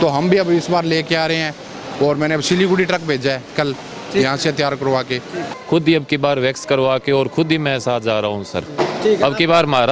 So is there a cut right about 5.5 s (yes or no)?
yes